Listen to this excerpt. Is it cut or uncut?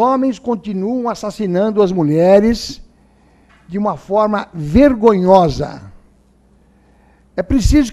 cut